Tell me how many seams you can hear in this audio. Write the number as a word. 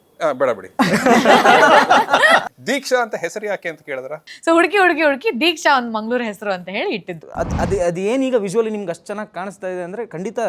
three